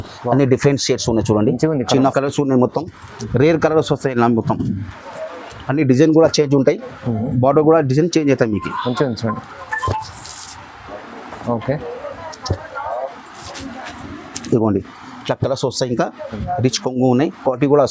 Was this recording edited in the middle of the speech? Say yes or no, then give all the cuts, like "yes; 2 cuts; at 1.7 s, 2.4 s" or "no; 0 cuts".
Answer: yes; 2 cuts; at 2.1 s, 16.4 s